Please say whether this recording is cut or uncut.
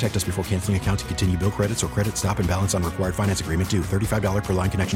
uncut